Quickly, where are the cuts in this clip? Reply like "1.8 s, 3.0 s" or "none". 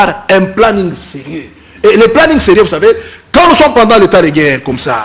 3.1 s